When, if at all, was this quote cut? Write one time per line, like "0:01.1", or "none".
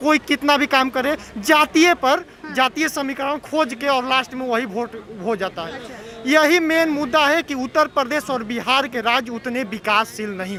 none